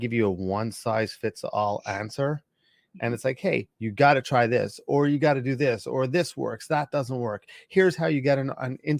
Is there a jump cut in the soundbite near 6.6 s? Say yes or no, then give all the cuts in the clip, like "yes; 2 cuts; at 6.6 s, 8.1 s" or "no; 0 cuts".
no; 0 cuts